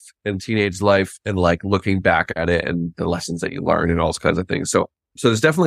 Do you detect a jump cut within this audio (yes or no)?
no